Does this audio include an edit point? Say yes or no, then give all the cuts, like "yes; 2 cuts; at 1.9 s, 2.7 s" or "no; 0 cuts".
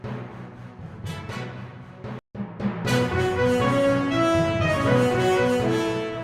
yes; 1 cut; at 2.2 s